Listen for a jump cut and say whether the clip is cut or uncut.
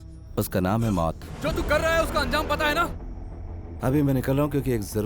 cut